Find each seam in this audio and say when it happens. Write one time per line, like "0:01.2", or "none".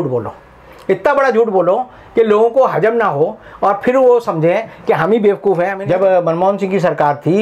0:05.8